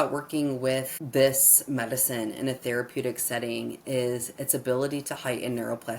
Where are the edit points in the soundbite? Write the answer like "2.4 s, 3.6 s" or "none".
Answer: 1.0 s